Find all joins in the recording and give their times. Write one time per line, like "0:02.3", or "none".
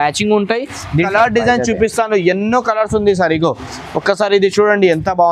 0:01.1